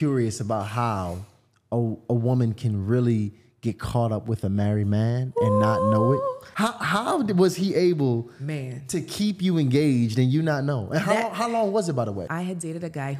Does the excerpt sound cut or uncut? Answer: cut